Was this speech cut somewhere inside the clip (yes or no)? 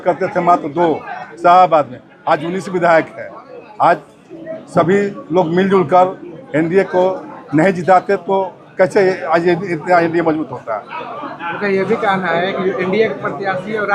no